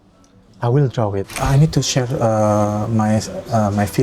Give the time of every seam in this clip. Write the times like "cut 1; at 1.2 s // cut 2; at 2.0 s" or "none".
cut 1; at 1.4 s